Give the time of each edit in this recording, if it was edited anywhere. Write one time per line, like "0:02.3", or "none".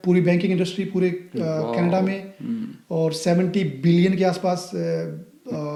none